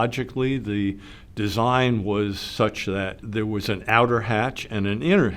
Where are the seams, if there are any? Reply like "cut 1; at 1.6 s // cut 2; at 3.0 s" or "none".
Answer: cut 1; at 3.2 s